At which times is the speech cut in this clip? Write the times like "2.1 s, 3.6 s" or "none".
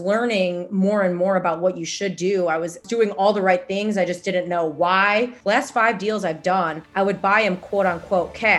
2.9 s, 5.4 s, 6.8 s